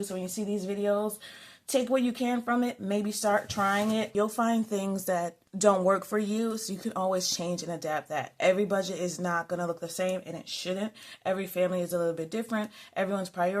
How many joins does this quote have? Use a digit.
2